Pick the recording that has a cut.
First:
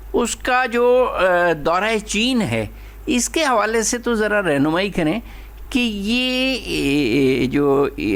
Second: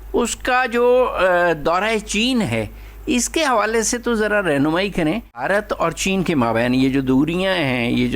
second; 1 cut; at 5.4 s

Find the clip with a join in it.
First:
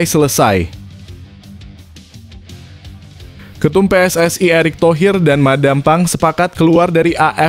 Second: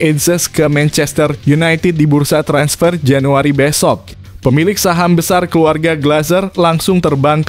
first; 2 cuts; at 1.3 s, 3.6 s

